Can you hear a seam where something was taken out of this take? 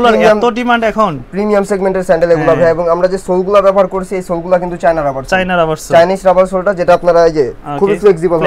no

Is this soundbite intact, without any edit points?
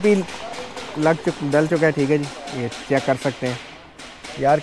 yes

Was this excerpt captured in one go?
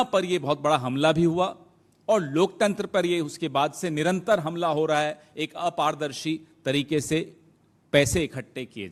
yes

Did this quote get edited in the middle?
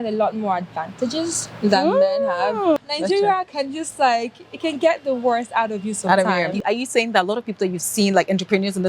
yes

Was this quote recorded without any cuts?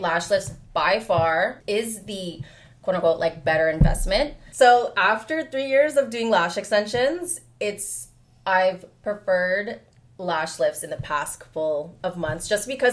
no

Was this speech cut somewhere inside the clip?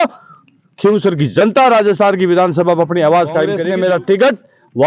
yes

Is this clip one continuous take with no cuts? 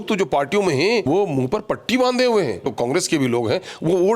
no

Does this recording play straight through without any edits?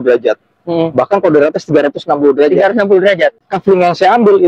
no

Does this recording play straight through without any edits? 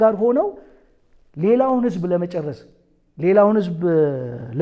yes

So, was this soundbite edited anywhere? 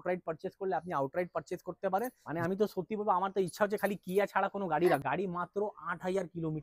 yes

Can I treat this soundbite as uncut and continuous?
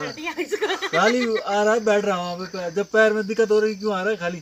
yes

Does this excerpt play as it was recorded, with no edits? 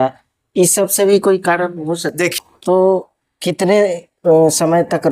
no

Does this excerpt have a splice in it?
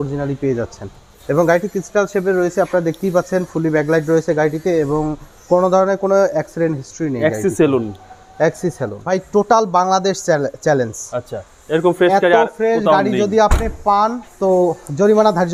yes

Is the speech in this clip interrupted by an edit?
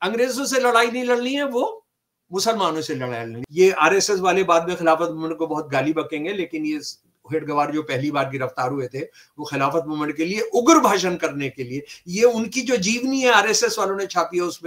yes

